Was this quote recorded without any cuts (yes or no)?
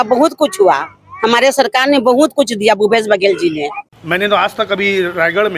no